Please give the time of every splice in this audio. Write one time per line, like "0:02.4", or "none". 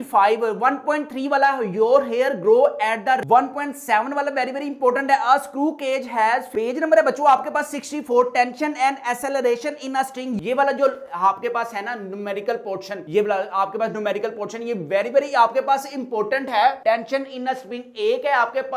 0:03.2
0:06.5
0:10.3